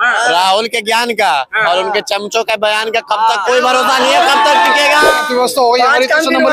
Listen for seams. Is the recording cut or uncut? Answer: cut